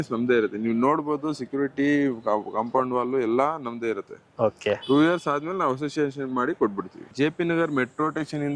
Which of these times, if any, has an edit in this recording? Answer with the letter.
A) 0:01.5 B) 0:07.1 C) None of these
B